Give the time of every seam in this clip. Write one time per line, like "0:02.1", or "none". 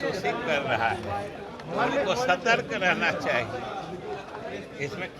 none